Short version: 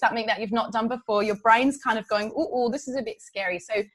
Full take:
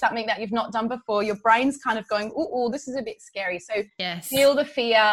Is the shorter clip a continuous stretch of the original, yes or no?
yes